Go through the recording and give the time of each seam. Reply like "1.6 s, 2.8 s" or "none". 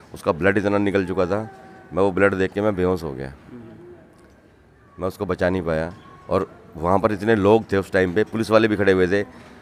none

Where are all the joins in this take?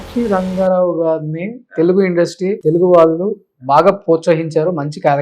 2.6 s

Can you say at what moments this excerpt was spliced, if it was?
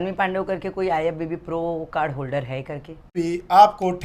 3.1 s

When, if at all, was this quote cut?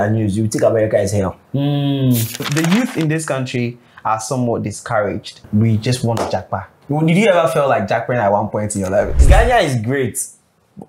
2.4 s, 5.4 s, 6.7 s, 9.2 s

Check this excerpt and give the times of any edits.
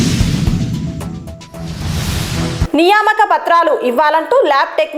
none

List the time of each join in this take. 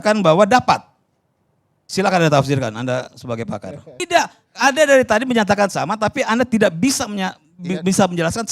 4.0 s

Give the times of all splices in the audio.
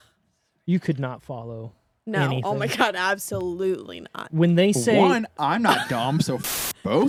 none

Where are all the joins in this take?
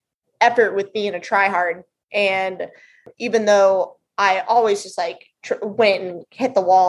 3.1 s

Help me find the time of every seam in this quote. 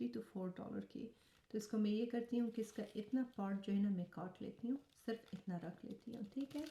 none

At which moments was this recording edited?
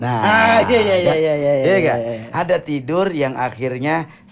none

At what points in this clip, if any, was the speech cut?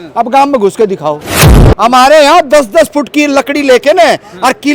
1.4 s

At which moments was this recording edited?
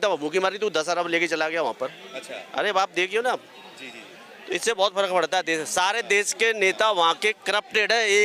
none

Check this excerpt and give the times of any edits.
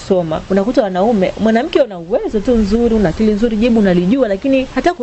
none

